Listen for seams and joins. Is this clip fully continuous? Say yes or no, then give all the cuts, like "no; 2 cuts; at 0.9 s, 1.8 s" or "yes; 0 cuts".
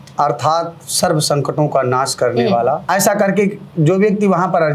no; 1 cut; at 2.9 s